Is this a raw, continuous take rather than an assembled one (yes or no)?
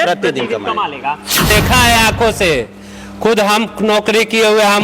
no